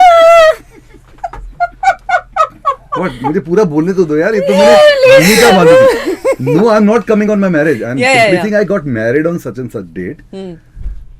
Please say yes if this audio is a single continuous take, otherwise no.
yes